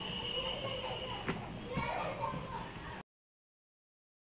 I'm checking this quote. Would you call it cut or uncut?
uncut